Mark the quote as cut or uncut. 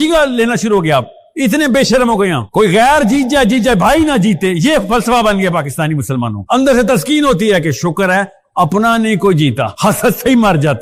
uncut